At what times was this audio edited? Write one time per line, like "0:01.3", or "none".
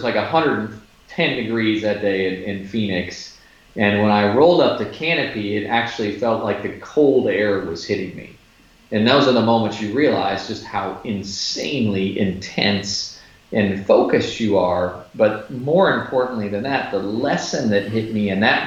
none